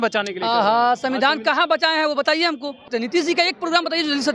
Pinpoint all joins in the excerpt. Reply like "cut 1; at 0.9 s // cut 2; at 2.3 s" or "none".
cut 1; at 2.9 s